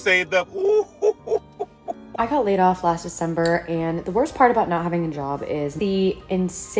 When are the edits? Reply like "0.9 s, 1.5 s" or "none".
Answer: 2.1 s, 5.7 s